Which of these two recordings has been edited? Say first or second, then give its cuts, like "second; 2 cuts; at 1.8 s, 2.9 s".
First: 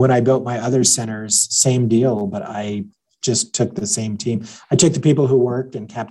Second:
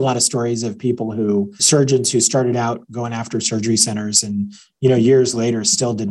second; 1 cut; at 1.6 s